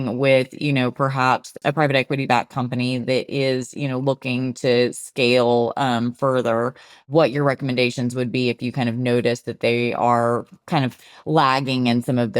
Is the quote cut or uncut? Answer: cut